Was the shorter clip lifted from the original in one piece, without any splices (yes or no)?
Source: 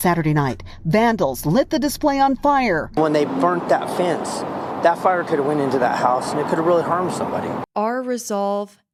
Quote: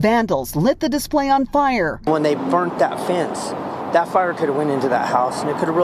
yes